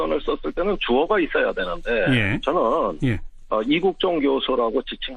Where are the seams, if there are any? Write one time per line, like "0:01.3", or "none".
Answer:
none